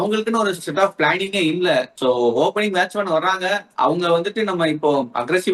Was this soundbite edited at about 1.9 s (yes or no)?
no